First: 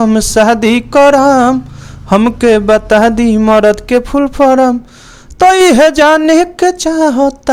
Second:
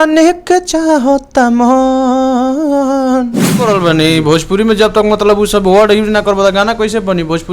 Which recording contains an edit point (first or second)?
second